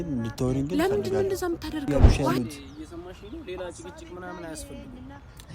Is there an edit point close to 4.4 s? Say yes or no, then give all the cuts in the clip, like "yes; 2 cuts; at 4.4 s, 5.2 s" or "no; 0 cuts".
no; 1 cut; at 1.9 s